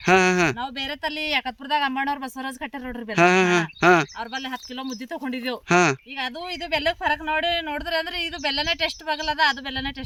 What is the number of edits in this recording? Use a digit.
0